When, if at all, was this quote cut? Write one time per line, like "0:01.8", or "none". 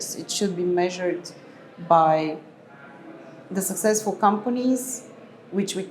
none